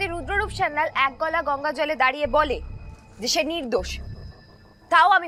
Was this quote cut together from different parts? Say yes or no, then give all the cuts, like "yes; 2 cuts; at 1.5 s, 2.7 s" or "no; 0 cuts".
no; 0 cuts